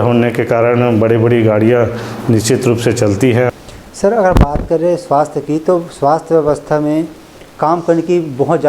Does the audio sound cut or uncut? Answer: cut